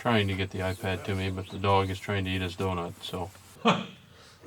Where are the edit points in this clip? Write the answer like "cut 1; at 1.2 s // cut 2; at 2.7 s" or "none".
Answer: cut 1; at 3.4 s